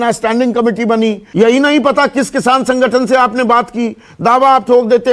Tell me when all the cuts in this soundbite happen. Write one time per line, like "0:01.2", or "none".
0:01.2